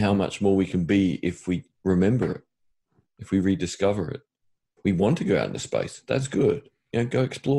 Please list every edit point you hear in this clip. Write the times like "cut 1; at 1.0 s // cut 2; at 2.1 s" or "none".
cut 1; at 4.8 s